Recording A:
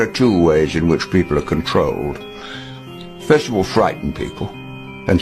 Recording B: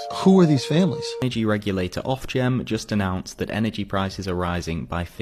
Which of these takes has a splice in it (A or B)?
B